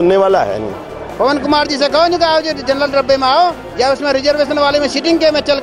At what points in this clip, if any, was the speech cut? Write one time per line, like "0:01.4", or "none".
0:01.0

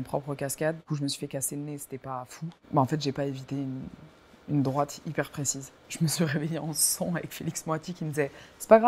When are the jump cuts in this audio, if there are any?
0:00.8
0:02.5
0:05.8

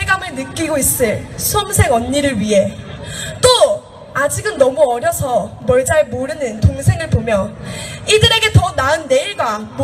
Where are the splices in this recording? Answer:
none

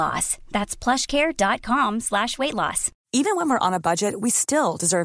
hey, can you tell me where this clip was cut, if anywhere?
0:02.9

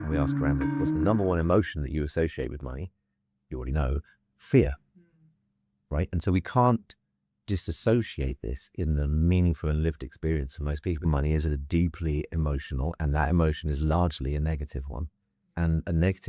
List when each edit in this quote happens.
0:11.0

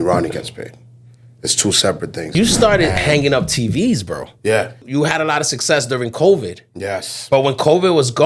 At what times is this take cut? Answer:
0:02.3
0:04.8

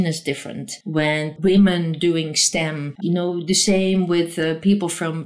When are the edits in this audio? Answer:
0:01.2
0:02.9

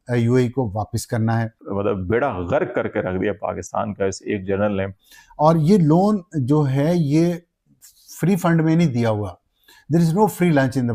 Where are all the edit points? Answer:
0:01.6
0:04.9

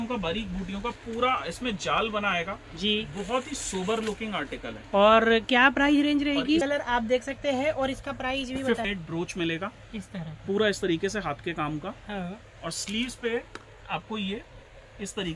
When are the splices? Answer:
0:06.6
0:08.8

